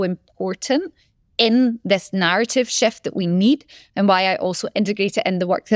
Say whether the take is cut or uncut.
uncut